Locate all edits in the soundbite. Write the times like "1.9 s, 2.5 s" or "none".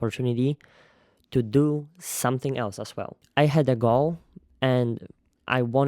3.2 s